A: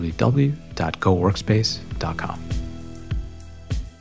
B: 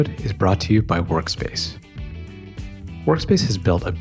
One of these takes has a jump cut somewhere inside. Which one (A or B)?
A